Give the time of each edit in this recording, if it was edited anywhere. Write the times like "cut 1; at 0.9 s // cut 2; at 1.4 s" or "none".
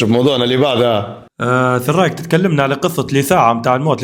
none